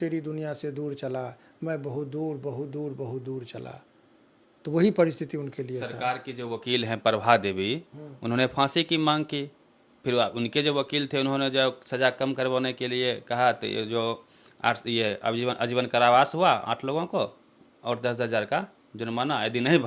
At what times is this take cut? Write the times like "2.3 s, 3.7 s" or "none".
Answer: none